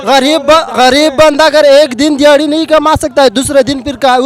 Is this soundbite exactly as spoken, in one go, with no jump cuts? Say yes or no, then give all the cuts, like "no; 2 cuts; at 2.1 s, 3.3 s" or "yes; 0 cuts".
yes; 0 cuts